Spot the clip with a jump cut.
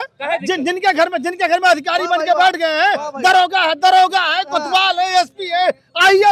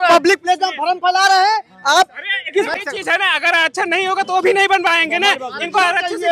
second; 1 cut; at 2.7 s

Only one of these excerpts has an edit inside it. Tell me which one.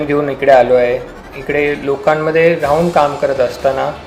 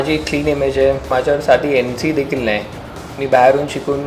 second; 1 cut; at 1.1 s

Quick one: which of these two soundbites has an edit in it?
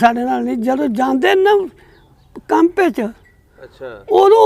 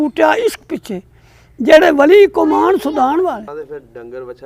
second; 1 cut; at 3.5 s

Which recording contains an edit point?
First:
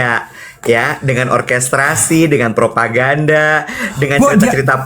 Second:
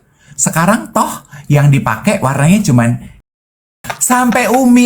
second; 1 cut; at 3.5 s

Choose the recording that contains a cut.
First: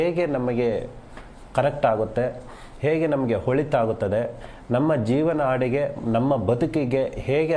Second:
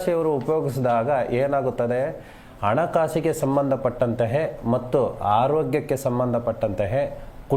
first; 2 cuts; at 3.9 s, 6.8 s

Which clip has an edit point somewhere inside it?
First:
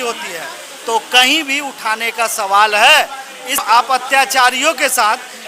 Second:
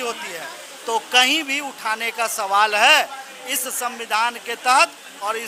first; 1 cut; at 3.6 s

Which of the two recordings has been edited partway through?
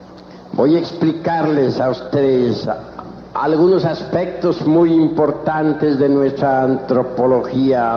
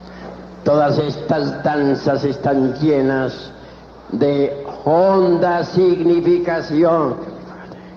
second; 1 cut; at 5.8 s

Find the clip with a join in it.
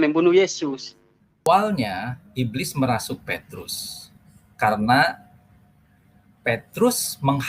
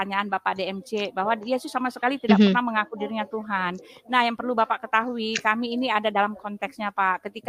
first; 1 cut; at 1.4 s

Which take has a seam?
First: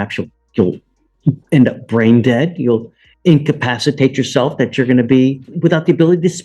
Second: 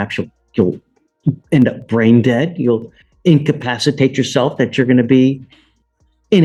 first; 1 cut; at 5.5 s

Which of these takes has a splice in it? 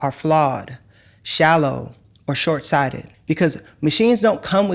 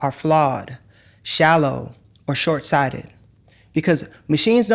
first; 1 cut; at 3.1 s

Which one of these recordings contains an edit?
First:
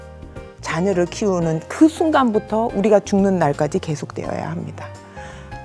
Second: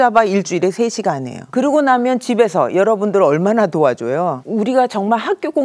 second; 2 cuts; at 1.3 s, 4.4 s

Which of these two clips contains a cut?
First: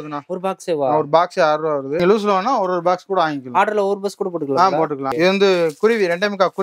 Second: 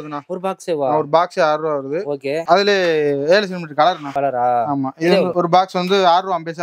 first; 2 cuts; at 2.0 s, 5.1 s

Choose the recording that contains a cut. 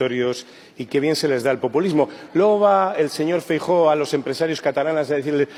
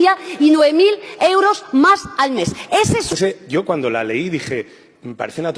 second; 1 cut; at 3.1 s

